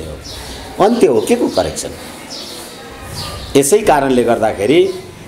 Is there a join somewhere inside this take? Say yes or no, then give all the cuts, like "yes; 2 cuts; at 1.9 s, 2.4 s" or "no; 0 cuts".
no; 0 cuts